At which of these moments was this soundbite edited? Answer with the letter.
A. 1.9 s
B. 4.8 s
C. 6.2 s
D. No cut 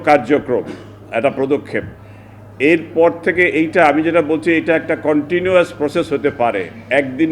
D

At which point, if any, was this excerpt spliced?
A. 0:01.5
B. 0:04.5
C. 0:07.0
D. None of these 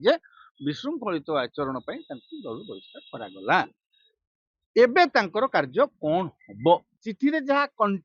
C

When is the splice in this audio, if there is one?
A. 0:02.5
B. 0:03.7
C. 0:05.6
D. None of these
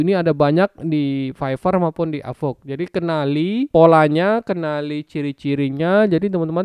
B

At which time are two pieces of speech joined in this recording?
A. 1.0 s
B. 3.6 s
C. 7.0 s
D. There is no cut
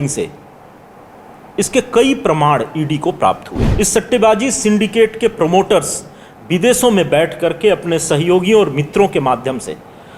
B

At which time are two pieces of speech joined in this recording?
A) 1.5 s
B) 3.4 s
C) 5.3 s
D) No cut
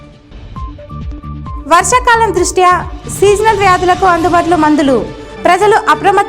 A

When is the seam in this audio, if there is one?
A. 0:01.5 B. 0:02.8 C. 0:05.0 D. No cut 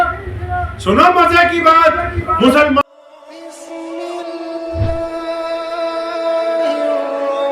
B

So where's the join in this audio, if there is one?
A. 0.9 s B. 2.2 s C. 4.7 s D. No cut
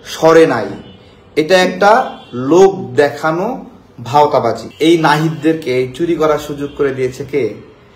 C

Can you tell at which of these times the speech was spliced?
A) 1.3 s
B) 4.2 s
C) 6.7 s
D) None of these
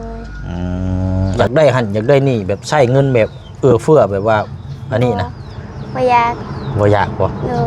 A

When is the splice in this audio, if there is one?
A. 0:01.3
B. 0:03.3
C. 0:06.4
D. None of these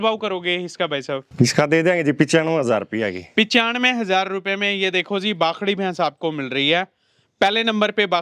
A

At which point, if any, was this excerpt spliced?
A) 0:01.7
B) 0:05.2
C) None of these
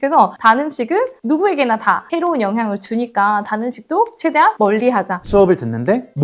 B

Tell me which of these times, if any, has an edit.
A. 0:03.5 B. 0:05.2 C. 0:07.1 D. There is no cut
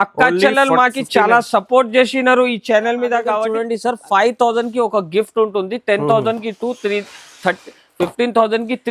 A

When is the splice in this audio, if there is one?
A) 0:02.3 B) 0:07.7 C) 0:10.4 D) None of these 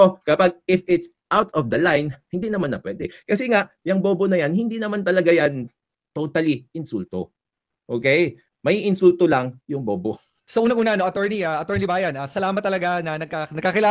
C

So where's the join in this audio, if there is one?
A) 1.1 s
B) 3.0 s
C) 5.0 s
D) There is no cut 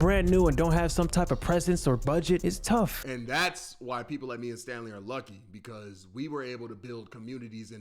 B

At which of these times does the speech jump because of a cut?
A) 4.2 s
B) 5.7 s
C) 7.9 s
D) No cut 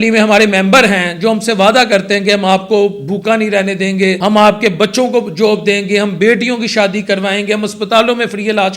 A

